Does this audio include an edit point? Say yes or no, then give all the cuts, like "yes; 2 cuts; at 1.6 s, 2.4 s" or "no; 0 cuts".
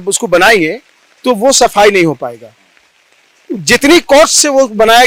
no; 0 cuts